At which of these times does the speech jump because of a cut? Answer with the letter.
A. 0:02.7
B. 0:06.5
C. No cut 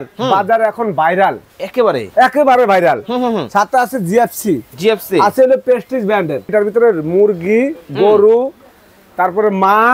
B